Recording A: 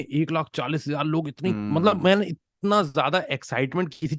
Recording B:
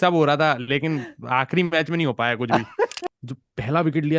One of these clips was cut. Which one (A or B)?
B